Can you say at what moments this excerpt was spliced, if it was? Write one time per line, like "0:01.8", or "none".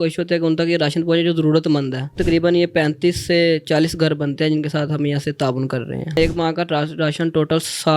0:02.2
0:06.2